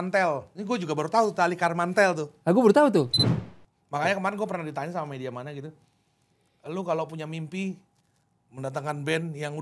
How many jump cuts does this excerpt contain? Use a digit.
1